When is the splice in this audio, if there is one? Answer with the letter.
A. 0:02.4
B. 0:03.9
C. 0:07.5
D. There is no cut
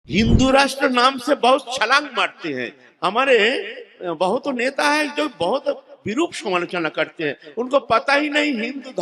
D